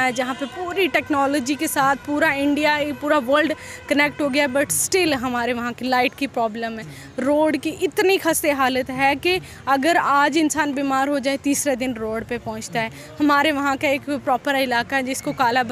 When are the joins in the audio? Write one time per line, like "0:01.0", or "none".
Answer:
none